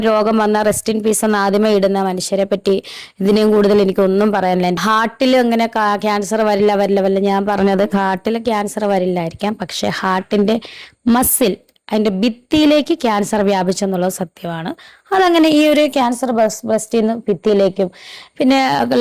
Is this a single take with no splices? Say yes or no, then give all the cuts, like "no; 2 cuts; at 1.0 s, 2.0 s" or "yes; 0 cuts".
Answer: no; 2 cuts; at 2.6 s, 4.8 s